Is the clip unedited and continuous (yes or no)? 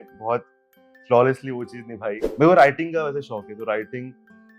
no